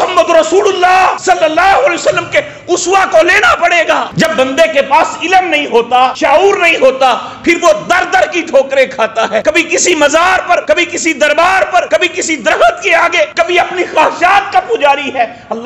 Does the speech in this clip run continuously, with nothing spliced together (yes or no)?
no